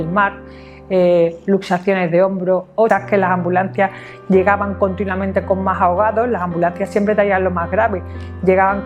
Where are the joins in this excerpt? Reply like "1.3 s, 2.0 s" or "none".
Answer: 2.9 s